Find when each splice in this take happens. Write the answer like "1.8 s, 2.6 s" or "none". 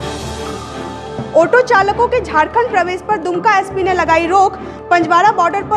none